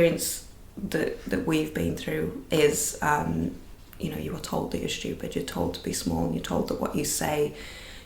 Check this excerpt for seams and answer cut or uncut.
cut